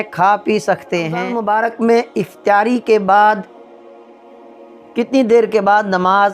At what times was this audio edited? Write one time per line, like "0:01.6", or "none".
0:01.3